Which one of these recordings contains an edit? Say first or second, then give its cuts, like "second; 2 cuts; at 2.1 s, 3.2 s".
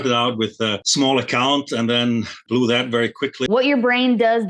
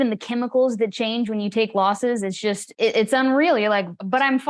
first; 1 cut; at 3.5 s